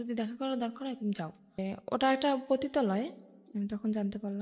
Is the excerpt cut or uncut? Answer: cut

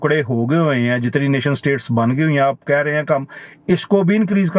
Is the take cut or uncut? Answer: uncut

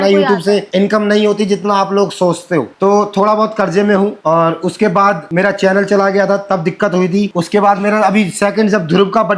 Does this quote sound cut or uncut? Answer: uncut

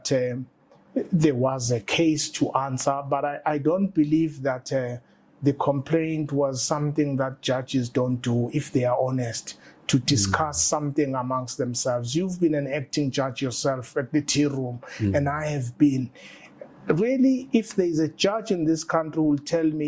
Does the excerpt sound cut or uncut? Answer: uncut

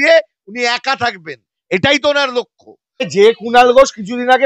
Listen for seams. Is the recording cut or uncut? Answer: cut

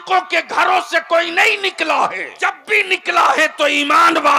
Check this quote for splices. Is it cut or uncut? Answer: cut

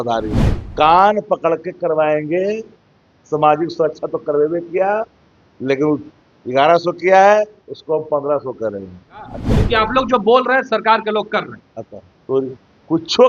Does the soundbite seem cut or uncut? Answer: cut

